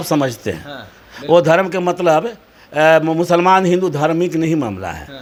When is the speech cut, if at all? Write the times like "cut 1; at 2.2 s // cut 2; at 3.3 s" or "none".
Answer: none